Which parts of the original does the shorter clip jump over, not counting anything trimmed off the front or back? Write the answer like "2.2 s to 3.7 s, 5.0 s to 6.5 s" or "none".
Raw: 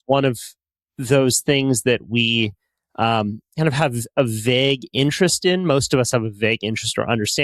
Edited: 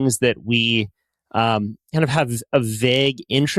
none